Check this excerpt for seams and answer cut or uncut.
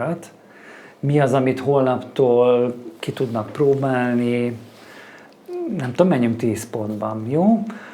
uncut